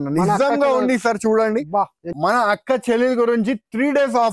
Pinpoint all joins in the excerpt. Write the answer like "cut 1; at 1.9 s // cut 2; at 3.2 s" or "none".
cut 1; at 2.0 s